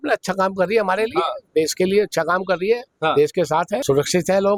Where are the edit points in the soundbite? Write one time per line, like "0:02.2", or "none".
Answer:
none